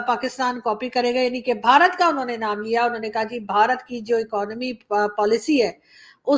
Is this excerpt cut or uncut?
uncut